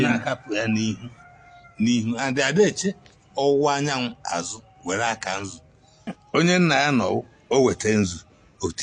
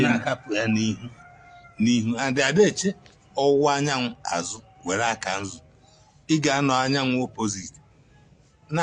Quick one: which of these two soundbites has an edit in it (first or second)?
first